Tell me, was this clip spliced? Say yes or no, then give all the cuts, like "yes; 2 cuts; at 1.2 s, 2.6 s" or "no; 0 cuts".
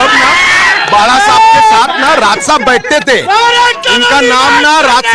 no; 0 cuts